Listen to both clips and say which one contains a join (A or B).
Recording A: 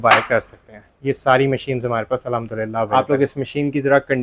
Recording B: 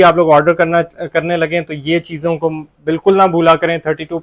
A